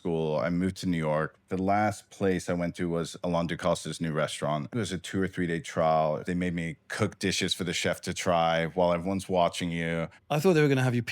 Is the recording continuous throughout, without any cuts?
no; 4 cuts; at 1.5 s, 4.8 s, 6.2 s, 10.1 s

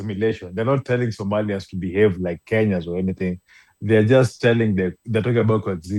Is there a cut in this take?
no; 0 cuts

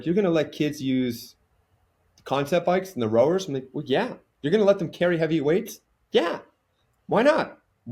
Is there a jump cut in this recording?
no; 0 cuts

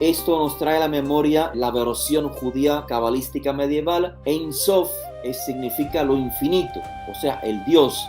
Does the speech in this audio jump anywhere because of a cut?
yes; 3 cuts; at 1.5 s, 2.9 s, 4.1 s

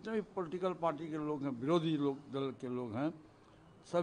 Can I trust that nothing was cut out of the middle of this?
yes; 0 cuts

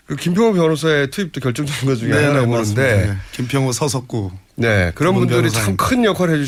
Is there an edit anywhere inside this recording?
no; 0 cuts

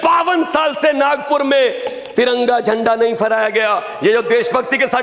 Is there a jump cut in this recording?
no; 0 cuts

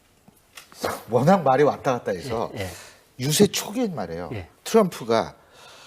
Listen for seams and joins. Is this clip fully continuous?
no; 1 cut; at 4.1 s

